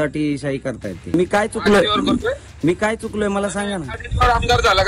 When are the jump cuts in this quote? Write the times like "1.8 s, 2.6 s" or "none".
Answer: 1.1 s